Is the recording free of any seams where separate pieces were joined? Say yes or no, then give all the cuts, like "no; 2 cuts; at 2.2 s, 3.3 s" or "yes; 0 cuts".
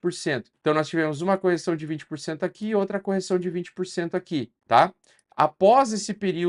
yes; 0 cuts